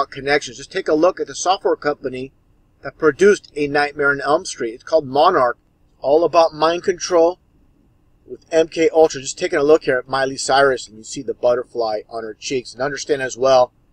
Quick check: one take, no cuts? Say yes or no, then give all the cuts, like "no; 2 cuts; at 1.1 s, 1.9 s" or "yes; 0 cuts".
no; 1 cut; at 3.1 s